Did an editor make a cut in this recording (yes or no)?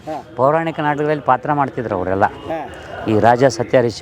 no